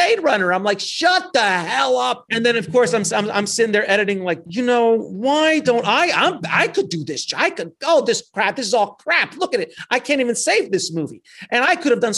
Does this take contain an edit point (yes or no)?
yes